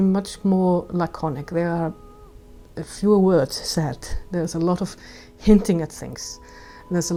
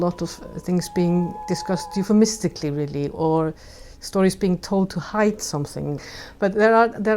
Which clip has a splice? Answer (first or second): second